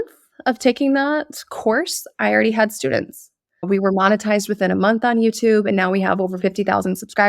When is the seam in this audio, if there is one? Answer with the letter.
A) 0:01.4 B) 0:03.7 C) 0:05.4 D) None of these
B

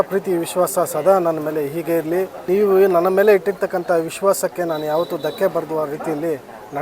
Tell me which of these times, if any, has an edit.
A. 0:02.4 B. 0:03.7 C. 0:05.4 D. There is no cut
A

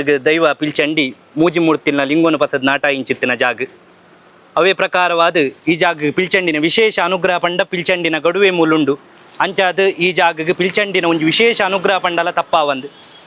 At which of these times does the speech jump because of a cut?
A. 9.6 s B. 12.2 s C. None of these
C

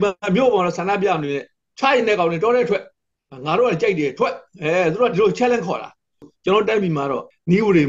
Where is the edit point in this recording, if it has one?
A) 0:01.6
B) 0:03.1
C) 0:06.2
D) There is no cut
C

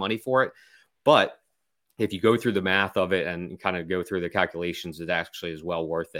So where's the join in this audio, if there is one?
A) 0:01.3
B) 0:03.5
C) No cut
C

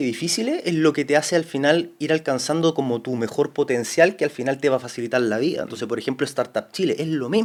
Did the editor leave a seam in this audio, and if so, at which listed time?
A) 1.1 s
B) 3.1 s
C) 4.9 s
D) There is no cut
D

